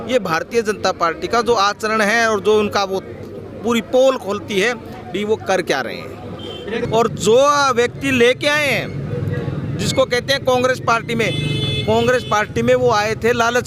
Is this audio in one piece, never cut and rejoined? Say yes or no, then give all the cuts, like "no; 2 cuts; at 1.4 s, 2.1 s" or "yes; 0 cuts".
no; 1 cut; at 6.8 s